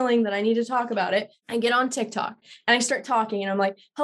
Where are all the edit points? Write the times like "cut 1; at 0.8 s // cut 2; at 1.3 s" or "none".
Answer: cut 1; at 1.4 s // cut 2; at 2.4 s